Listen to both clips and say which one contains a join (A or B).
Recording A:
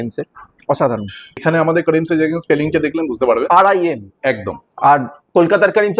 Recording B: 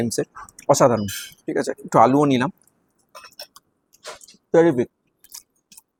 A